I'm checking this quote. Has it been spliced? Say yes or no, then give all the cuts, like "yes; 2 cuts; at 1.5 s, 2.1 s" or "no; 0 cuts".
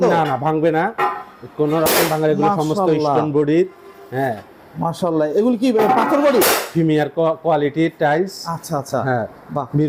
no; 0 cuts